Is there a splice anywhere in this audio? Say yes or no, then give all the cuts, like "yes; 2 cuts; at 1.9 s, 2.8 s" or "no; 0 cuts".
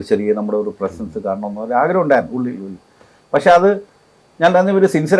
no; 0 cuts